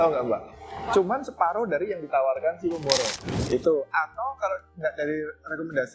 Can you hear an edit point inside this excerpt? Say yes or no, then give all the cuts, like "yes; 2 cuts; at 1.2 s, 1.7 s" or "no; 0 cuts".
yes; 1 cut; at 3.1 s